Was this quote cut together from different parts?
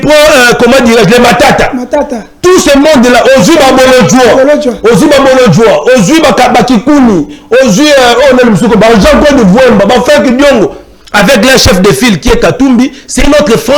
no; 0 cuts

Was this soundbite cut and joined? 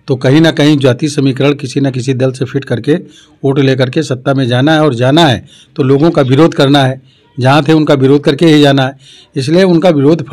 no; 0 cuts

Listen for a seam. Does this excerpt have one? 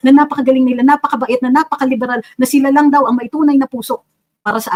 no; 0 cuts

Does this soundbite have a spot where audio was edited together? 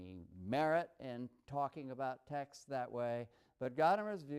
yes; 1 cut; at 2.4 s

